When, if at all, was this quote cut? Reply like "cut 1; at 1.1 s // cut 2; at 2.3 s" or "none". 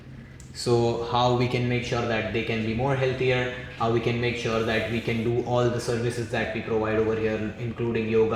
none

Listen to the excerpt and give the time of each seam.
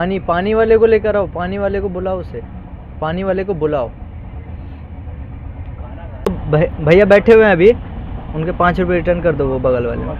cut 1; at 6.4 s

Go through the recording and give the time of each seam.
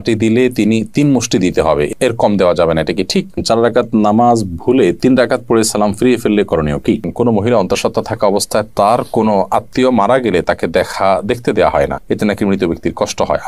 cut 1; at 3.4 s // cut 2; at 7.1 s

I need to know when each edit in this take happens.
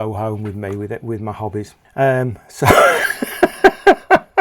cut 1; at 1.8 s

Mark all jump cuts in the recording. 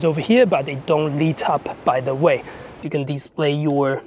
cut 1; at 2.8 s

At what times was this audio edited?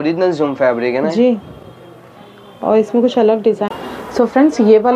none

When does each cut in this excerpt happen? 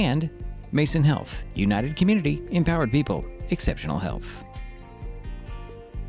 cut 1; at 4.2 s

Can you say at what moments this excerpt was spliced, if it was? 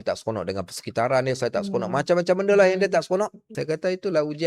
cut 1; at 3.5 s

